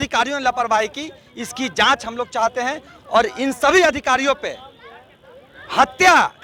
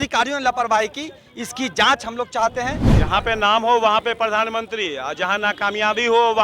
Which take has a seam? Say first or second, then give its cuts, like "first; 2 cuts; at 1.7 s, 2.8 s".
second; 1 cut; at 2.9 s